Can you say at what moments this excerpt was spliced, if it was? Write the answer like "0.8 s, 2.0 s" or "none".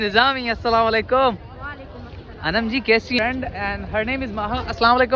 3.2 s